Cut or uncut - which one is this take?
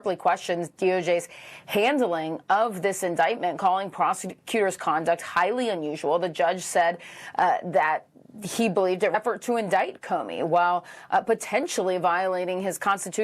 cut